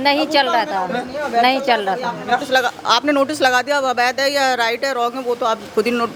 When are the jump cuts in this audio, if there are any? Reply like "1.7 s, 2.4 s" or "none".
none

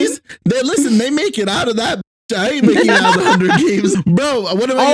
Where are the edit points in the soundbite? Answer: 3.9 s

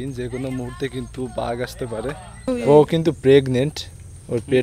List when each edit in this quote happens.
2.5 s

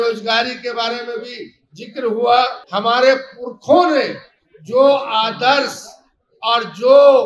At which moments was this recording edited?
2.6 s

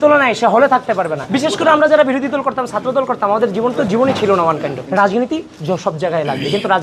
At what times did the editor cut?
1.2 s, 4.8 s

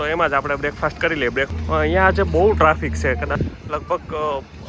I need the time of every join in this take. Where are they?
1.5 s, 3.4 s

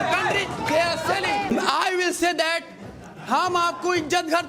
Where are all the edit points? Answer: 1.5 s

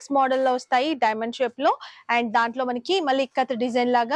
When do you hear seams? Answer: none

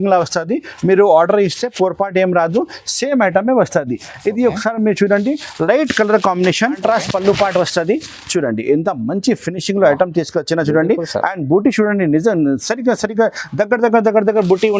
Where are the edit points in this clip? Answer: 6.8 s

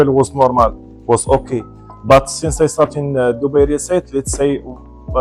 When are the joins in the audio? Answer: none

